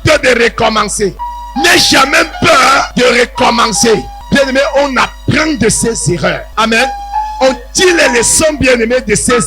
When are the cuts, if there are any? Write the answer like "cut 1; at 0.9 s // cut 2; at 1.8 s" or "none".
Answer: cut 1; at 1.3 s // cut 2; at 2.9 s // cut 3; at 4.1 s // cut 4; at 6.4 s

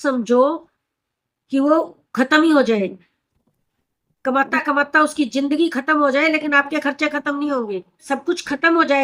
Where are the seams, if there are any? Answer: cut 1; at 8.0 s

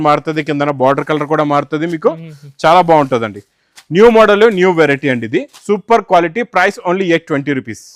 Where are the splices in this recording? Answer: none

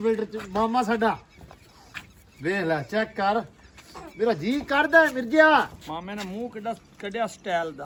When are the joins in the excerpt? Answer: none

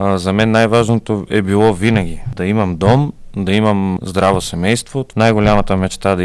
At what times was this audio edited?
cut 1; at 2.3 s // cut 2; at 4.0 s // cut 3; at 5.0 s

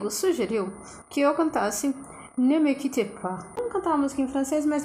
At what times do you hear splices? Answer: cut 1; at 3.6 s

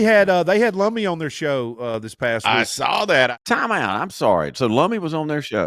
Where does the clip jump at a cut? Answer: cut 1; at 3.4 s

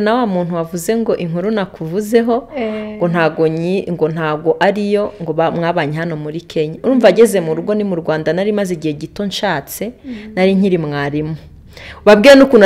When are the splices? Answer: none

